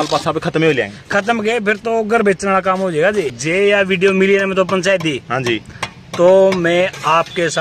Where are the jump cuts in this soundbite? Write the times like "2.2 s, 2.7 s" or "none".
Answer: 3.3 s